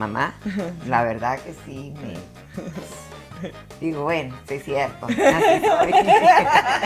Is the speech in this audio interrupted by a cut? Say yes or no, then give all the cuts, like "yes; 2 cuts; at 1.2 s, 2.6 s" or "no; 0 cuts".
no; 0 cuts